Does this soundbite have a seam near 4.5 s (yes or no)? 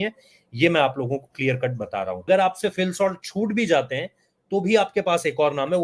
no